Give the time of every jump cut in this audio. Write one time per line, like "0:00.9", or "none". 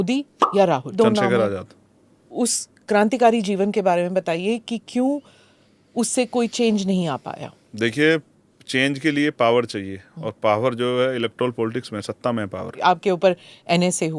0:00.9
0:02.3
0:12.7